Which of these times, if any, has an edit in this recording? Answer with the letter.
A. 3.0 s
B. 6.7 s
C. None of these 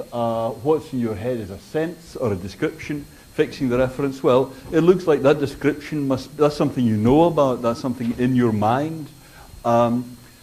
B